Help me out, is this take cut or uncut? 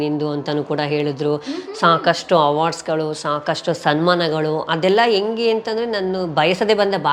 uncut